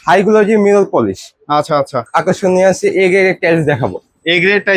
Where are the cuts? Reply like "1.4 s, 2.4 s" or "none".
2.1 s